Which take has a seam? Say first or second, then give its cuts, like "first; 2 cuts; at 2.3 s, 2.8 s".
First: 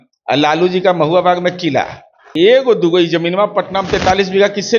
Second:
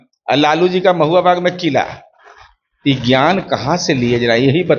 first; 1 cut; at 2.2 s